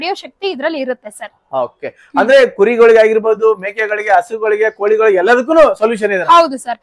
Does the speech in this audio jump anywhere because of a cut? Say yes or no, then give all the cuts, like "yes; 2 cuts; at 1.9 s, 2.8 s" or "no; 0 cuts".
no; 0 cuts